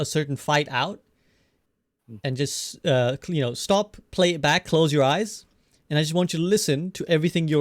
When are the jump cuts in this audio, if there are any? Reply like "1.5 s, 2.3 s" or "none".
none